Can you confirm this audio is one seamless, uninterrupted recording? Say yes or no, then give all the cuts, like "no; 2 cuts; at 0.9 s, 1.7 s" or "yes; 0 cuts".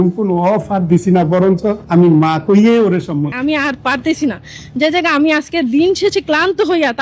no; 2 cuts; at 1.8 s, 3.3 s